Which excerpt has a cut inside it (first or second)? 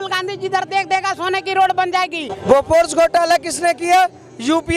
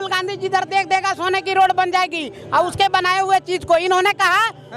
first